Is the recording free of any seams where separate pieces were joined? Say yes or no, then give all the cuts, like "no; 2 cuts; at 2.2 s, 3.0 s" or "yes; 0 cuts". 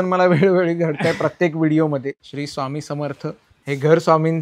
no; 2 cuts; at 2.2 s, 3.5 s